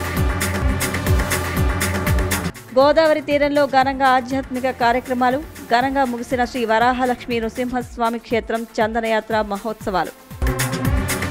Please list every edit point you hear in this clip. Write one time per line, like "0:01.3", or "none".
0:02.5